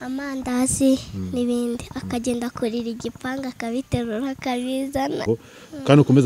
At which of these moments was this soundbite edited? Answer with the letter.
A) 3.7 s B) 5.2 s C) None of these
B